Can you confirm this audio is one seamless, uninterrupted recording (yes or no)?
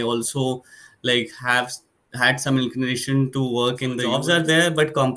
no